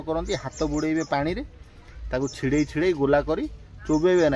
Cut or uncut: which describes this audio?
uncut